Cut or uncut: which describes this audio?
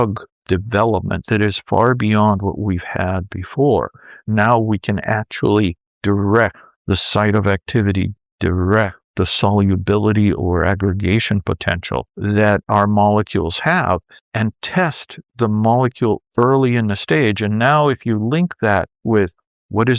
cut